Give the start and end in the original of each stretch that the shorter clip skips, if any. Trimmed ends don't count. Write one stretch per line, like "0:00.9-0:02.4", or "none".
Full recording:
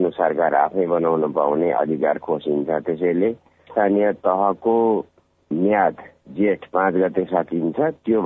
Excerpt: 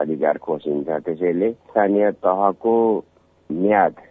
0:03.4-0:03.6